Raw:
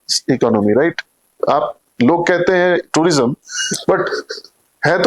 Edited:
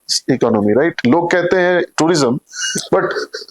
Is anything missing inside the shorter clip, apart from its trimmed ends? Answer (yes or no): yes